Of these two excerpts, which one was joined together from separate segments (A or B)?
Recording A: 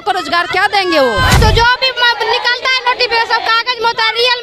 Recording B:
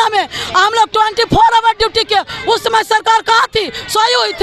A